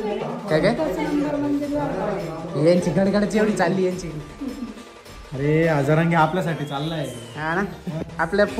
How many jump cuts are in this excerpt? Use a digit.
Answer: 0